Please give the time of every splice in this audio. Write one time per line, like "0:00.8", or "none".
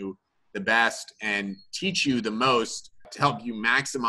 0:03.1